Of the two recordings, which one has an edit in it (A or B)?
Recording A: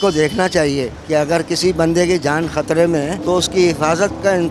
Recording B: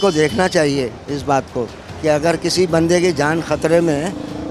A